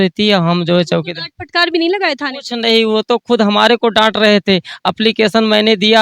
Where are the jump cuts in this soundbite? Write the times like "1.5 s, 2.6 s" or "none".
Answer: none